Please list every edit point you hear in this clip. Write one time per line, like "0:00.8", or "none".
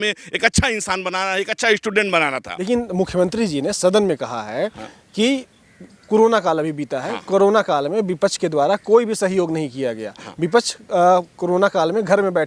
0:02.5

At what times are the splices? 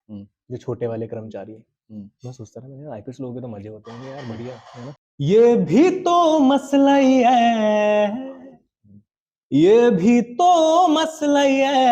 0:05.0

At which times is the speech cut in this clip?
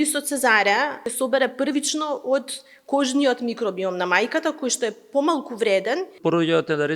0:01.0
0:06.1

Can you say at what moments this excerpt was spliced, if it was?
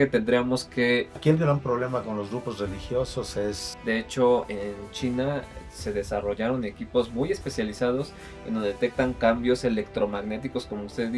0:01.2
0:03.7

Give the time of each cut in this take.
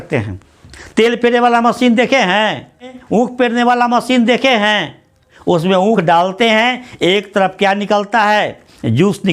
0:03.0

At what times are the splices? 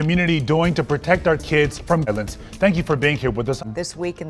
0:02.1
0:03.6

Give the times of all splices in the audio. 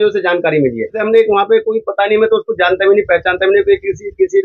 0:01.0

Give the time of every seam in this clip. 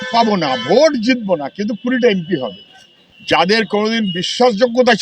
0:03.1

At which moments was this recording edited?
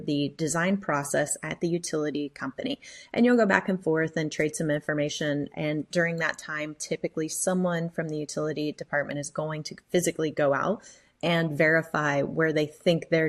none

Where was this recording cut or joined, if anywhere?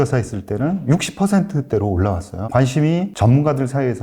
0:02.3
0:03.1

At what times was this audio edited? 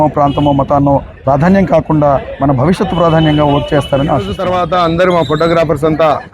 0:04.4

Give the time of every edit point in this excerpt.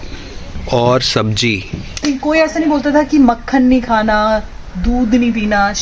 0:02.0

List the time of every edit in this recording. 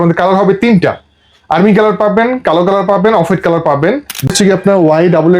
0:04.3

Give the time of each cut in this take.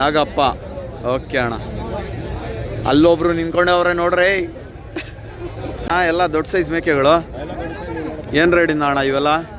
0:05.9

